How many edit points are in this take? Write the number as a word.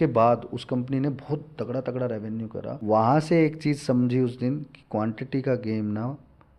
one